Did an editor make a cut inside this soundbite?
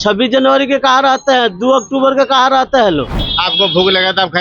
yes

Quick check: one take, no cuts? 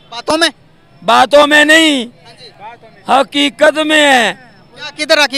yes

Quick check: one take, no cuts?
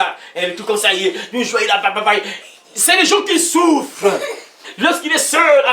yes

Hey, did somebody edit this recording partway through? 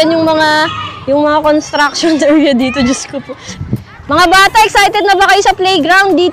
yes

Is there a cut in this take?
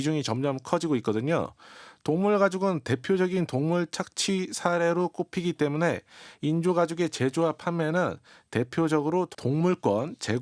yes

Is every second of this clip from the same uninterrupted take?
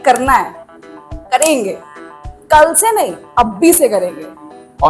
yes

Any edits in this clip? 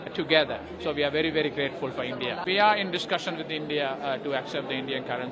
yes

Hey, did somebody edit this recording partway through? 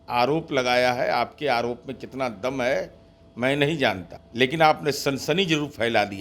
yes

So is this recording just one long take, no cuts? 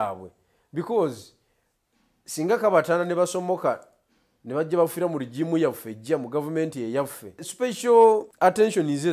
no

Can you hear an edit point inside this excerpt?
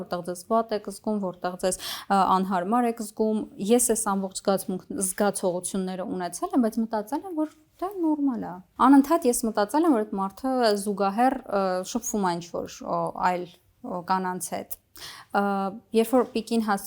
no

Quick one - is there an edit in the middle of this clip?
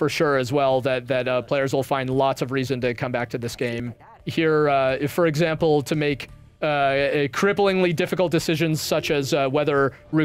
yes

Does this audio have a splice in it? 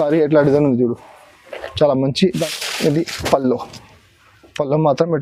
yes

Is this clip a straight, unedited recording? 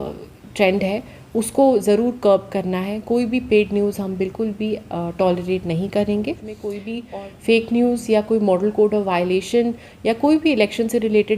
no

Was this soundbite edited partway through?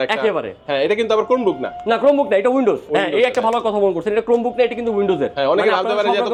no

